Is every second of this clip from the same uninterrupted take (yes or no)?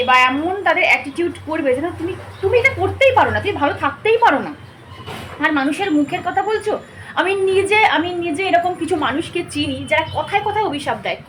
yes